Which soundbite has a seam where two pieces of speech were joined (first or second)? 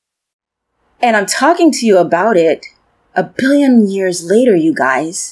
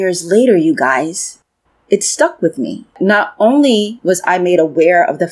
second